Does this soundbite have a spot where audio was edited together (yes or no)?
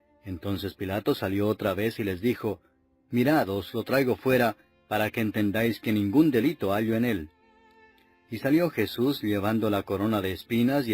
yes